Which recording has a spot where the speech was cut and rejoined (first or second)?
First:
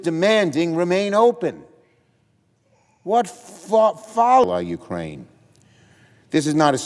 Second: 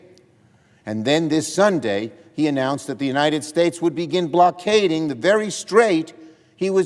first